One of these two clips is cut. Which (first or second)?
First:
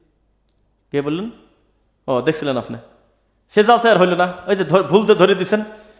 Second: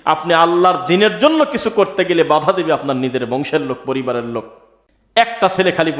second